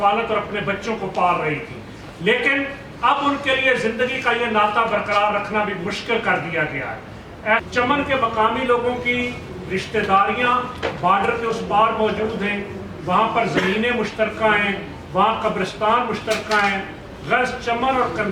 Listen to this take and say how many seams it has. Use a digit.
1